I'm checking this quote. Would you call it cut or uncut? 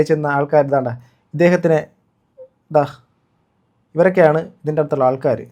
uncut